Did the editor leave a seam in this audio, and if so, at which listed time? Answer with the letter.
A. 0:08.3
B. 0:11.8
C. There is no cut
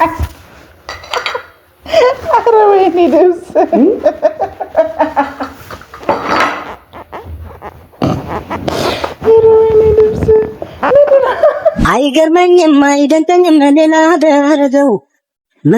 B